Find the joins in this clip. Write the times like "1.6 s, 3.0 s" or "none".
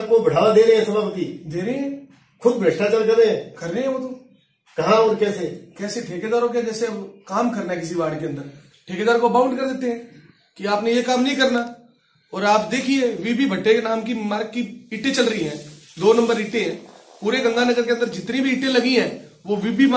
none

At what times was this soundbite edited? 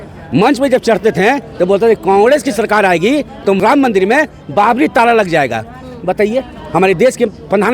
3.6 s

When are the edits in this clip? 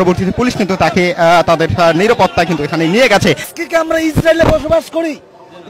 3.5 s

